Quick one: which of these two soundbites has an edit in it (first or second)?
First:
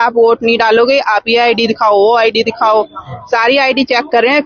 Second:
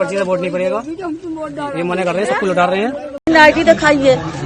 second